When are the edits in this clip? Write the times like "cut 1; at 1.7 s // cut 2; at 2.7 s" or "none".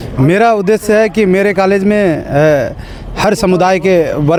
none